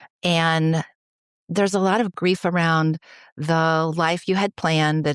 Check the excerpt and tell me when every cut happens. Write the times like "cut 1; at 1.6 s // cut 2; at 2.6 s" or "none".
cut 1; at 2.1 s